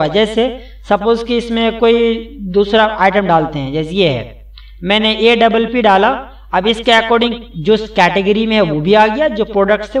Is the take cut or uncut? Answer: uncut